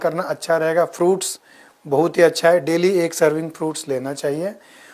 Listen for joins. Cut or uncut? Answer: uncut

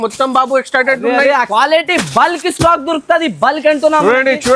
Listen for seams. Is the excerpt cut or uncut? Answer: cut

